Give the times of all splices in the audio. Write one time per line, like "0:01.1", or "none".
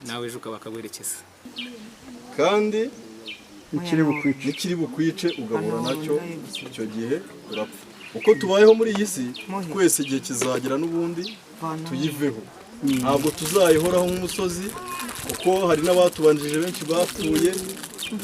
0:01.6

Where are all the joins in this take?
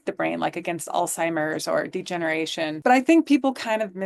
0:02.7

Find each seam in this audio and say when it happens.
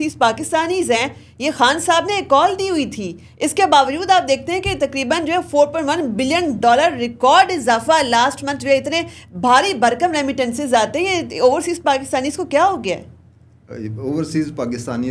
none

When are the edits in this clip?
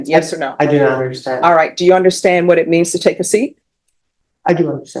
none

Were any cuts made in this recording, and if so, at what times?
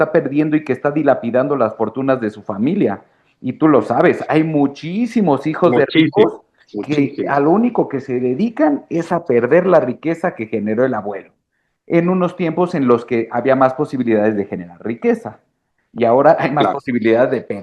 none

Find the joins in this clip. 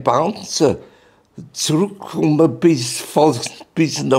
none

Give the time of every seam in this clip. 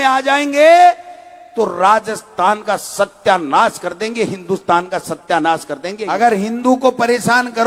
0:06.0

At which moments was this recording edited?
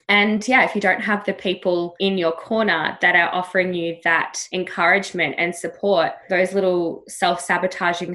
0:01.9
0:04.4

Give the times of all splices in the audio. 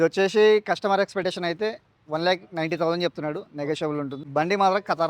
0:04.2

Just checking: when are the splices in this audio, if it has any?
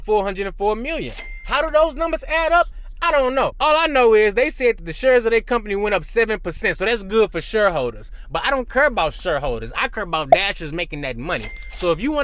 0:03.5

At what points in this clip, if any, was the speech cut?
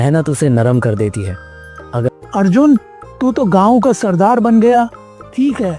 0:02.1

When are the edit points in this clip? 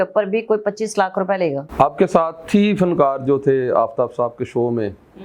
0:01.6

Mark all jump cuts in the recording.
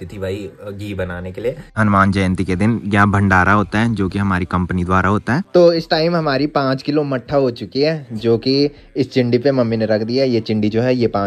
0:01.6
0:05.4

